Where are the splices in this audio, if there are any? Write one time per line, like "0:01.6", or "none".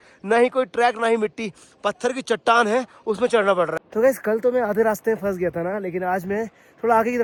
none